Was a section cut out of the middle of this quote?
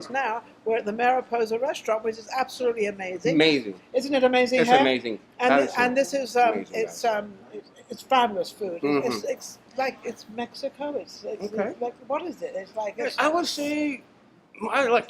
no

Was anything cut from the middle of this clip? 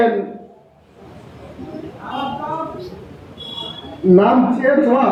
no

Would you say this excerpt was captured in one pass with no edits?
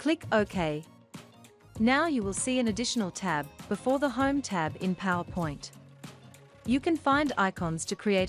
no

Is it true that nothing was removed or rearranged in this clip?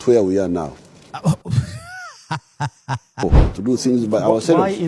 no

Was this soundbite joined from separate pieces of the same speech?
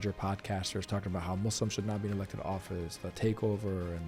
no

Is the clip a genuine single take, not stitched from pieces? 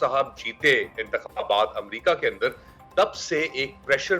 yes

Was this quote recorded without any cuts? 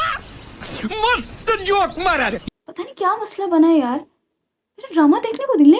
no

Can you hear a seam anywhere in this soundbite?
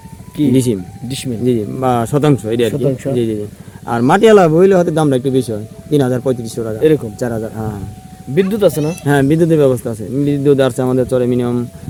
no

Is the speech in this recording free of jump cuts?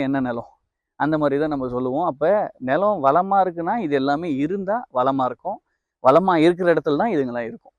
yes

